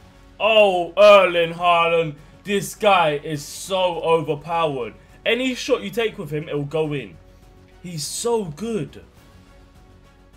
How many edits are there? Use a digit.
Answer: 0